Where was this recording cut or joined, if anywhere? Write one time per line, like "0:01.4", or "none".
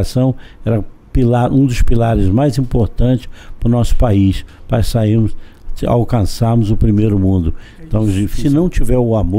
0:08.3